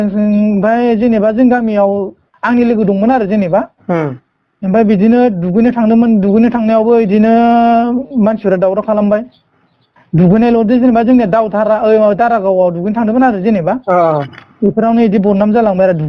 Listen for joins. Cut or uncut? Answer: uncut